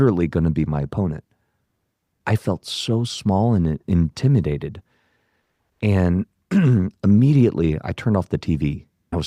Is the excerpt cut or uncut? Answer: uncut